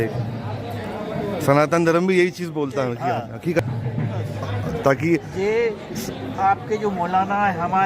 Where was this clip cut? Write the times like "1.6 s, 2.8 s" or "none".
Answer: 3.6 s